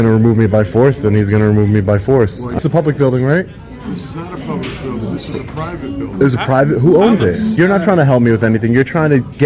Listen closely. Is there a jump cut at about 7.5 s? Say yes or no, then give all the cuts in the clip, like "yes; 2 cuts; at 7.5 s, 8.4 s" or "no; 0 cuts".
yes; 2 cuts; at 2.5 s, 7.5 s